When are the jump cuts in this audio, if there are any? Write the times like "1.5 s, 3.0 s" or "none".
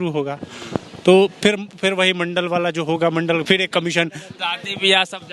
4.3 s